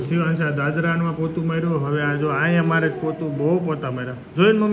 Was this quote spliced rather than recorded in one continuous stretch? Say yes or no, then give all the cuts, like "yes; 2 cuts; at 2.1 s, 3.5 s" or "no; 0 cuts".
no; 0 cuts